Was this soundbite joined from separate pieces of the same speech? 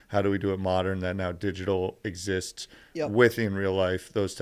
no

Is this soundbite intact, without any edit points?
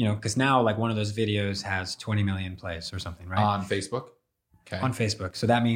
yes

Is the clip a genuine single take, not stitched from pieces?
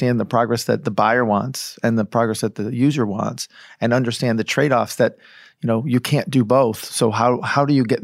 yes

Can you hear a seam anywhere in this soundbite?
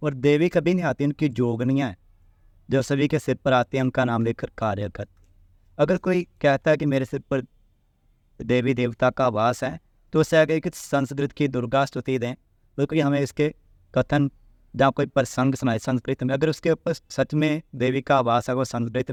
no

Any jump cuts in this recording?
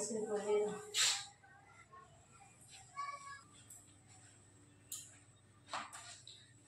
yes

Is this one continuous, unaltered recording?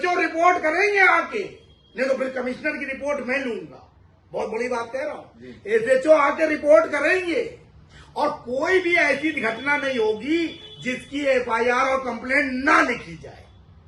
yes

